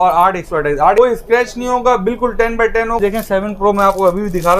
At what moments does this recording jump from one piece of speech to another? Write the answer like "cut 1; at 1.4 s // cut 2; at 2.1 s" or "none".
cut 1; at 1.0 s // cut 2; at 3.0 s